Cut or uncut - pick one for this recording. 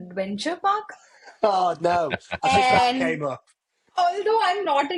uncut